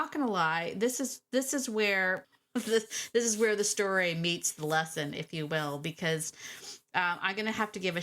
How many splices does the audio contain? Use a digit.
1